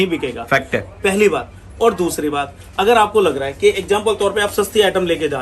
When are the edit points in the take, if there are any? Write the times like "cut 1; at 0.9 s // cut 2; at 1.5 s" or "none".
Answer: none